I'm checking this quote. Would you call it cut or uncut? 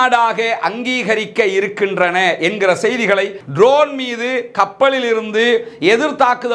cut